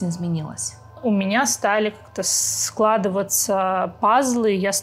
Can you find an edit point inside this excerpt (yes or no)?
yes